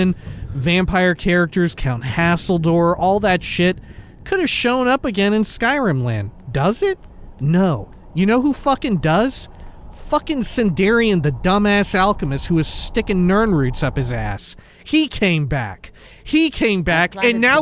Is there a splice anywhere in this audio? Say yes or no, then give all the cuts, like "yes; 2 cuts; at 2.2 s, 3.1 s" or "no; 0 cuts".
no; 0 cuts